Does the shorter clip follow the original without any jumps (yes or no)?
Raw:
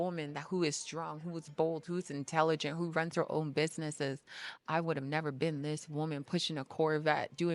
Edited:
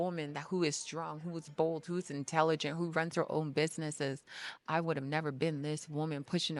yes